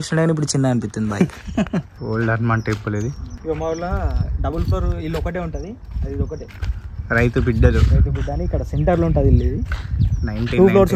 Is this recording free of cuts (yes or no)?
no